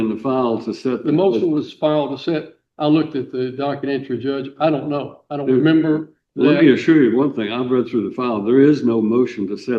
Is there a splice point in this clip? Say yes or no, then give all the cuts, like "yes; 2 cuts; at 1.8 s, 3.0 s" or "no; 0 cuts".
no; 0 cuts